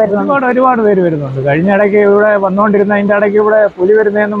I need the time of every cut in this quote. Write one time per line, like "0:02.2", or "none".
none